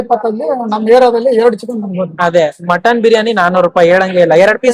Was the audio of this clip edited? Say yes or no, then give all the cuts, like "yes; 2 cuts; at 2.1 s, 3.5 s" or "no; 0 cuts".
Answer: no; 0 cuts